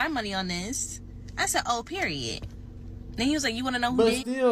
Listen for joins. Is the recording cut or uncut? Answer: uncut